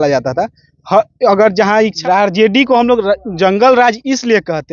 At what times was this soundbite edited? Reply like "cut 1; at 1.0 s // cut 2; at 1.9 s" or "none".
cut 1; at 2.0 s